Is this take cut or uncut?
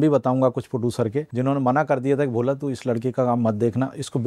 cut